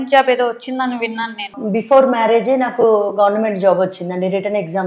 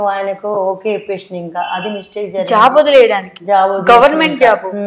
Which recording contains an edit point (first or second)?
first